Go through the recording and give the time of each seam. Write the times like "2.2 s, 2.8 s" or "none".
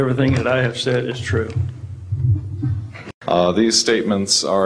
3.0 s